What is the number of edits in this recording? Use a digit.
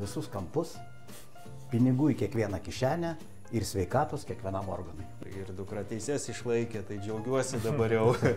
1